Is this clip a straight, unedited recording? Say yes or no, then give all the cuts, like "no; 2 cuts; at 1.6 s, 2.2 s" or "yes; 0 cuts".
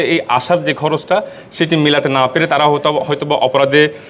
yes; 0 cuts